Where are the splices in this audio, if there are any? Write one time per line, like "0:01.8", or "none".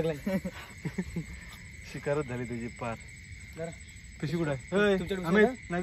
none